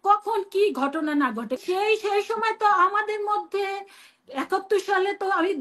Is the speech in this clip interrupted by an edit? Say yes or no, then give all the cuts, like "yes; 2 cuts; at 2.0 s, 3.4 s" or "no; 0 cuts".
yes; 1 cut; at 1.6 s